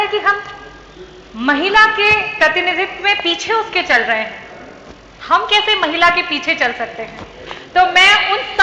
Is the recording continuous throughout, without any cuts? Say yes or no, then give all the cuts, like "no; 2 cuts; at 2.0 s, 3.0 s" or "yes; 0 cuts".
yes; 0 cuts